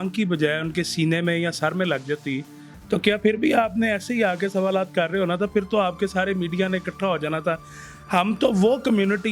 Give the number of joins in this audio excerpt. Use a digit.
0